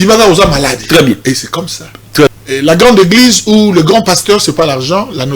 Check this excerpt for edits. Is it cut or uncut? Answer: cut